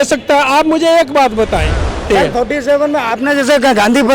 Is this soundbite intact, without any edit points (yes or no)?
no